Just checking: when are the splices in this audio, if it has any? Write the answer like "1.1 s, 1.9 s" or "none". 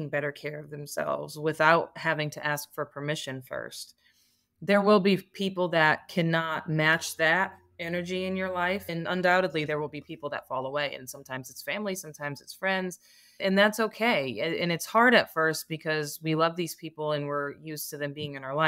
8.9 s, 13.4 s